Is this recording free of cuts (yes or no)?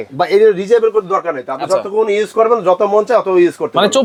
yes